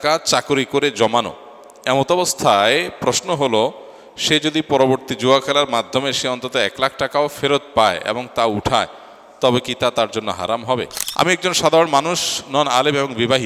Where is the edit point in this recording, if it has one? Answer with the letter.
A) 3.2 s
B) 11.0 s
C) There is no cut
B